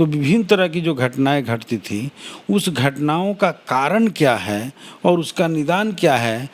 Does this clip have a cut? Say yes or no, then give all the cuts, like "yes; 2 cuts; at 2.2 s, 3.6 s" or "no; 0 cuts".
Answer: no; 0 cuts